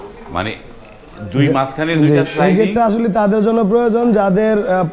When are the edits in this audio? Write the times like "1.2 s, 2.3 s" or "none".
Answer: none